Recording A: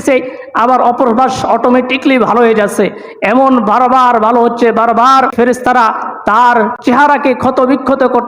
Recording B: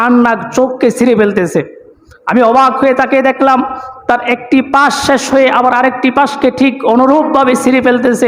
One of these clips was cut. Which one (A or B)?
A